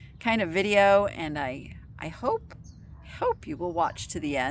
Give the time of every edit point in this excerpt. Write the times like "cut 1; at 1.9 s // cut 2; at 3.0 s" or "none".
none